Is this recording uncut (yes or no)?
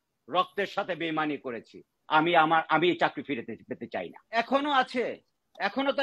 no